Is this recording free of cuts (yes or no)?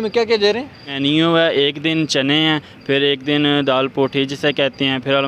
no